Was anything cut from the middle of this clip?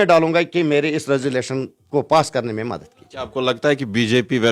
no; 0 cuts

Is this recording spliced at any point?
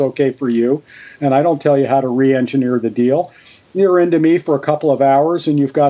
no; 0 cuts

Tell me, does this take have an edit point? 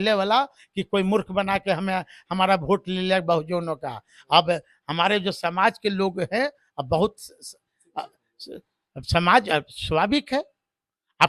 no; 0 cuts

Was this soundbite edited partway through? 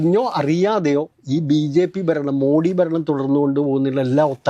no; 0 cuts

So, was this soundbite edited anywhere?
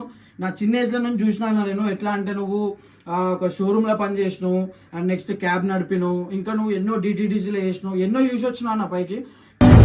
no; 0 cuts

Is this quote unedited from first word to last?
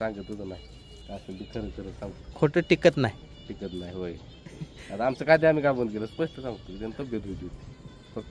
yes; 0 cuts

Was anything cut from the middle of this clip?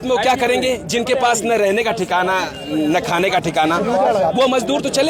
no; 0 cuts

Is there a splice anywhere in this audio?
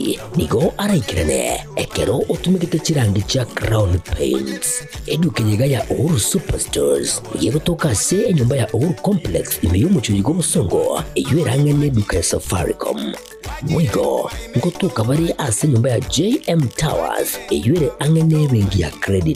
no; 0 cuts

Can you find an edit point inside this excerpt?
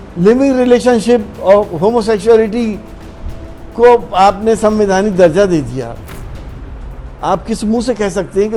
no; 0 cuts

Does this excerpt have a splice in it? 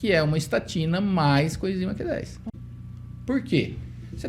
yes; 1 cut; at 2.4 s

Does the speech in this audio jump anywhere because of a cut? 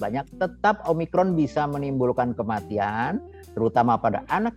no; 0 cuts

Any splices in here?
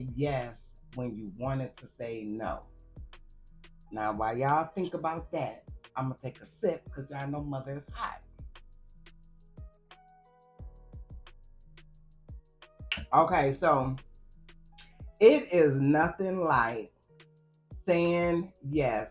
no; 0 cuts

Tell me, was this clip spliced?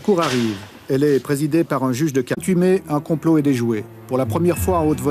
no; 0 cuts

